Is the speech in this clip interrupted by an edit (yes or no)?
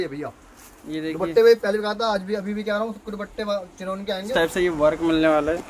yes